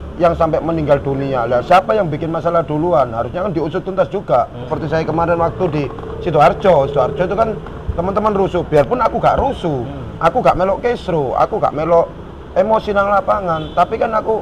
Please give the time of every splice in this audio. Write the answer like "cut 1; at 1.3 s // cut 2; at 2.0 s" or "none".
cut 1; at 4.7 s